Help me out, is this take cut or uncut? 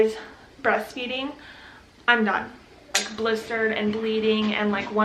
cut